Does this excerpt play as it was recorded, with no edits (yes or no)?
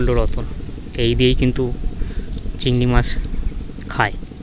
yes